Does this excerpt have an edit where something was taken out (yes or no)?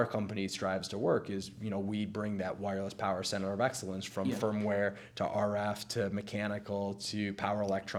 no